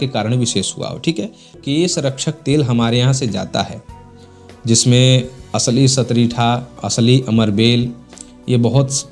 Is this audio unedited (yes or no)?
no